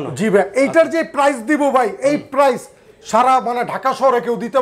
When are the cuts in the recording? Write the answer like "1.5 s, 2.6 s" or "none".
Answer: none